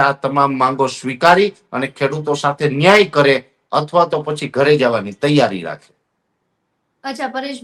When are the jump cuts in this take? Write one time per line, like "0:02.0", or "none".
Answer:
none